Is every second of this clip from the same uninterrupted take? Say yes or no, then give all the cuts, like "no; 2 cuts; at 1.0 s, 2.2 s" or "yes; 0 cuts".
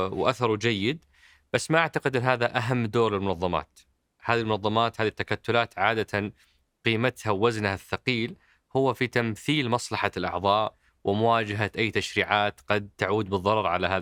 yes; 0 cuts